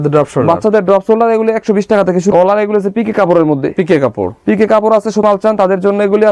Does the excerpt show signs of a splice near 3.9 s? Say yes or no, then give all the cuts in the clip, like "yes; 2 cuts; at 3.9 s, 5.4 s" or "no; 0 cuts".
no; 2 cuts; at 2.3 s, 5.2 s